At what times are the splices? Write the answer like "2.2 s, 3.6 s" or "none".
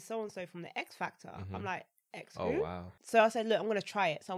2.9 s